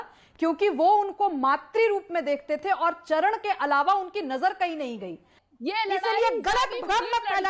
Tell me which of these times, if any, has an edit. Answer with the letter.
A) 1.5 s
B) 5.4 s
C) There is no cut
B